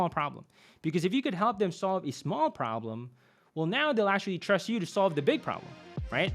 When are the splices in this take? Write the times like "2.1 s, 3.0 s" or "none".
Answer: none